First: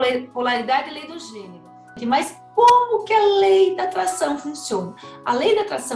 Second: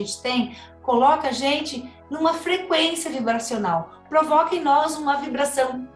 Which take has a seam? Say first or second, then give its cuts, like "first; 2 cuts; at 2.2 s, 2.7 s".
first; 1 cut; at 1.9 s